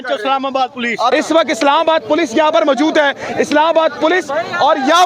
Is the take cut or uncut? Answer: cut